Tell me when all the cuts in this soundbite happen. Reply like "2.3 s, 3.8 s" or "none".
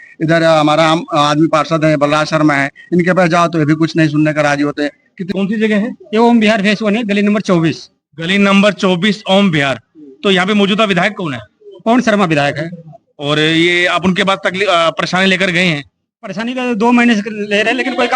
5.1 s